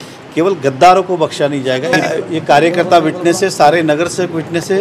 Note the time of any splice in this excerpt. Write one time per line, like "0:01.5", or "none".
none